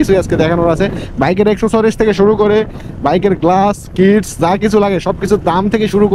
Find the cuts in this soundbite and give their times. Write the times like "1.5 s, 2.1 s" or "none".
none